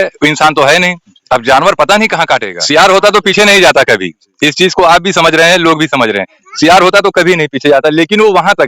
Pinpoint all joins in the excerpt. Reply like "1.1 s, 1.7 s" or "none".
2.5 s